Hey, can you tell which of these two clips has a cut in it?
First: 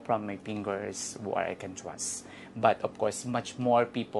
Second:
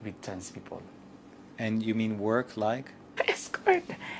second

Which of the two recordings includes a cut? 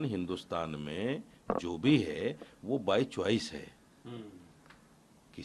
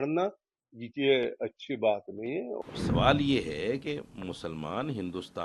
second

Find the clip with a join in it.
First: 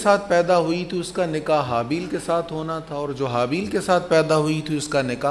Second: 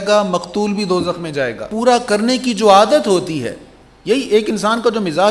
second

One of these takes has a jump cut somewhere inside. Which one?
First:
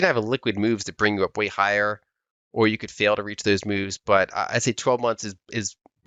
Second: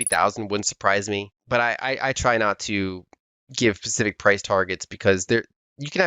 second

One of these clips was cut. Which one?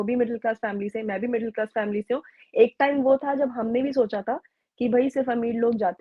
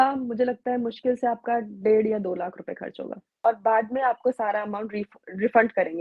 second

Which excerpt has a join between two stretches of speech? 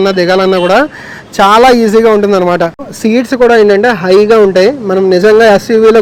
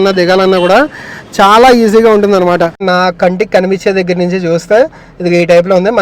second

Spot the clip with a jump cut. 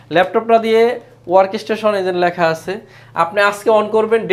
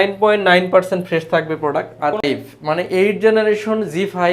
second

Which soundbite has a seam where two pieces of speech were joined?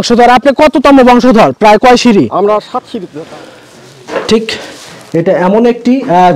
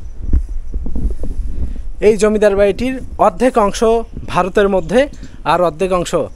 first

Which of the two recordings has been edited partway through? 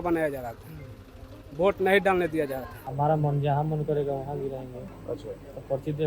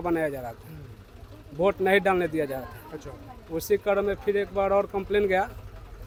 first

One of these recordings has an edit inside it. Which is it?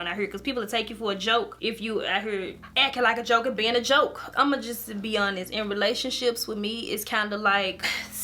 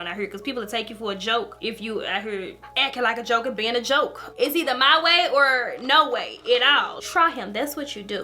second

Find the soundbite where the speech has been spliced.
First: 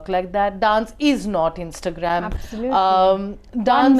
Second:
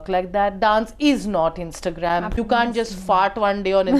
second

